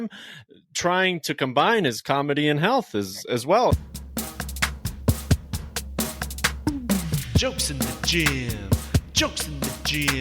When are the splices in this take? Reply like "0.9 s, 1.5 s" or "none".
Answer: 3.7 s